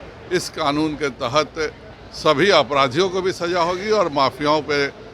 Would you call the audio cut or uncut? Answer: uncut